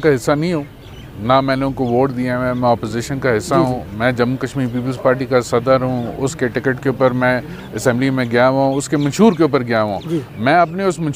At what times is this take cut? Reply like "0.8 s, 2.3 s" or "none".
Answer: none